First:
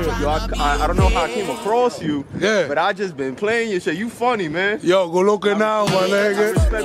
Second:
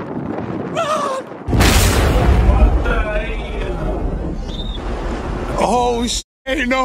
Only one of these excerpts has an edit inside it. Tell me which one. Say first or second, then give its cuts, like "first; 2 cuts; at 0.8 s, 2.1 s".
second; 1 cut; at 1.0 s